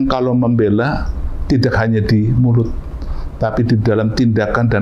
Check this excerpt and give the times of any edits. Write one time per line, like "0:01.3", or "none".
none